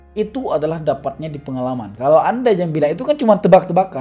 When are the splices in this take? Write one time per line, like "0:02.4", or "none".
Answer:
none